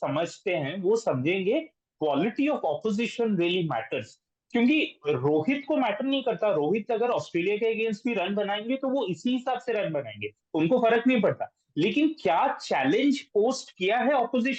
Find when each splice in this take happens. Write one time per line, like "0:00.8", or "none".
none